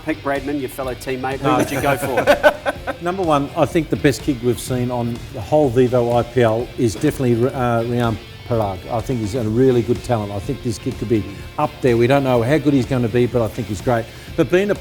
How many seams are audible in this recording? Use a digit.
0